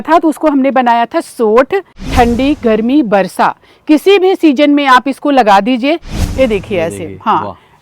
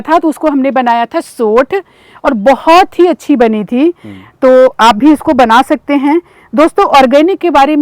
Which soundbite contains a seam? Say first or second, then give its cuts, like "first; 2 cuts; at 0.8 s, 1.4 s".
first; 2 cuts; at 2.0 s, 6.1 s